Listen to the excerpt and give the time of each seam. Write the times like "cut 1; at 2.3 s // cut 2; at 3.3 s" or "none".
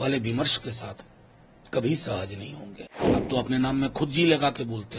cut 1; at 3.2 s